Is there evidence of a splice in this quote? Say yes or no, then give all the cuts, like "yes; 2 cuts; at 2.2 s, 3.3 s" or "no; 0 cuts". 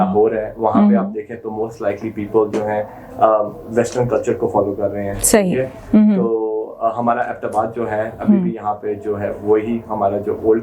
no; 0 cuts